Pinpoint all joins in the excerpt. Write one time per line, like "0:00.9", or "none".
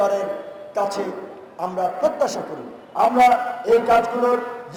none